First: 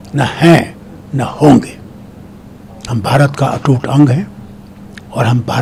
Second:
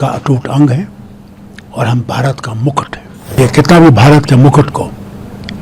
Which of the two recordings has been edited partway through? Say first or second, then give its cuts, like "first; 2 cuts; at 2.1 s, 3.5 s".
second; 1 cut; at 3.4 s